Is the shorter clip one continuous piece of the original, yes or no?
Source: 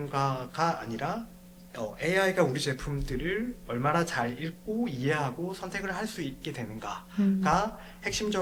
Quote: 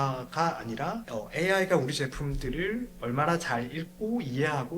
no